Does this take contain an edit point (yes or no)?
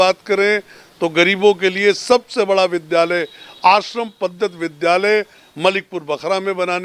no